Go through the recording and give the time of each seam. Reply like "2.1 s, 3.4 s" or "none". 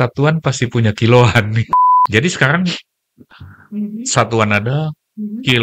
1.7 s

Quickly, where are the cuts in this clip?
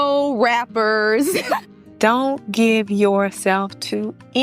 1.6 s

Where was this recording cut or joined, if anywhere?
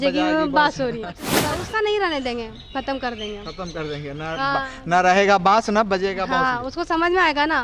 1.3 s

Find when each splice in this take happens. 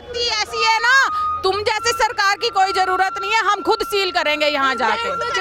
none

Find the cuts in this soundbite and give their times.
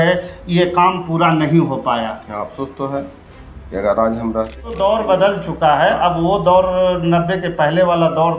4.8 s

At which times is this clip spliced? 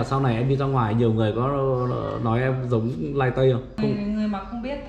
3.8 s

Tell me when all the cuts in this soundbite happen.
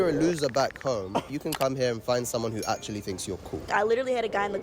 3.7 s

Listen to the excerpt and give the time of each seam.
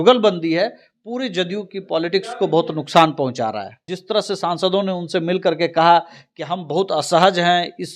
3.9 s

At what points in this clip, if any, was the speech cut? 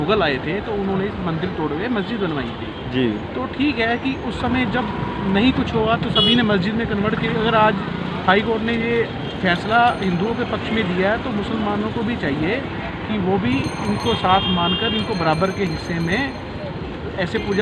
none

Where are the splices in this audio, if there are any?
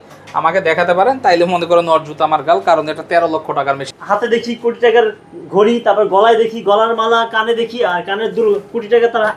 3.9 s

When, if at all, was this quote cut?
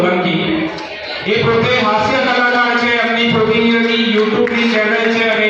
none

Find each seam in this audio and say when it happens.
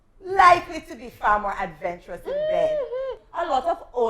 3.1 s

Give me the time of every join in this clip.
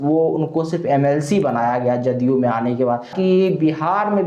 3.1 s

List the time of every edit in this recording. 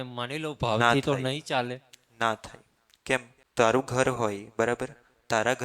3.5 s

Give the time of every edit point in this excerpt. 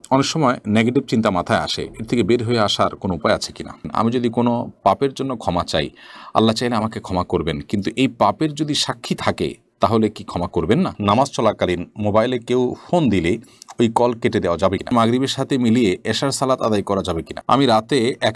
3.8 s, 11.0 s, 14.9 s, 17.3 s

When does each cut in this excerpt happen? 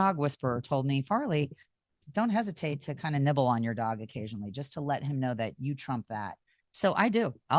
2.0 s

